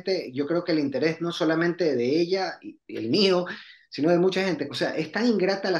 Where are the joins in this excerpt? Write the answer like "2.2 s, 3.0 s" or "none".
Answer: 4.6 s